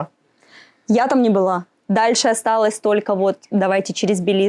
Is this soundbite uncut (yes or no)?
no